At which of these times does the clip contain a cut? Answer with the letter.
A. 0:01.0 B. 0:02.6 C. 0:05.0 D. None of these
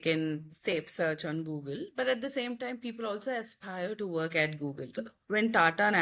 C